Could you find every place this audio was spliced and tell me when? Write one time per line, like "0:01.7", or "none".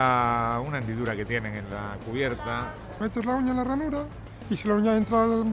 none